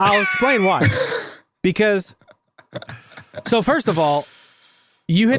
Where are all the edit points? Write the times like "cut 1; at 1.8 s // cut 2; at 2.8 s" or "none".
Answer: none